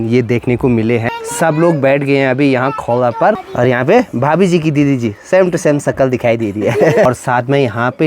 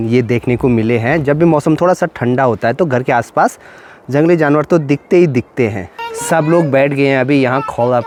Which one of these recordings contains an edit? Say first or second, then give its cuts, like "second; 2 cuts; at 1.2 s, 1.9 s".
first; 3 cuts; at 1.1 s, 3.5 s, 7.0 s